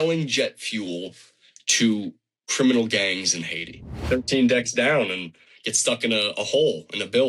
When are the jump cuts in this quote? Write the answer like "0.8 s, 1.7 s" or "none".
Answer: 4.1 s